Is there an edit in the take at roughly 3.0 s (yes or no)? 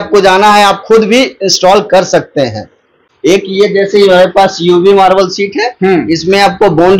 yes